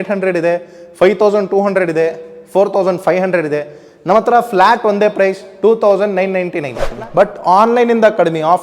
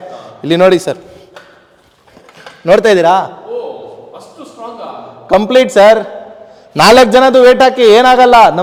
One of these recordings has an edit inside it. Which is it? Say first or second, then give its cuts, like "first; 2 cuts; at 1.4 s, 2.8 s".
first; 1 cut; at 6.8 s